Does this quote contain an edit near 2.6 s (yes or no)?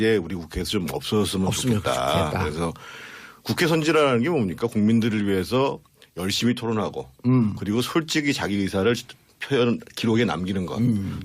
yes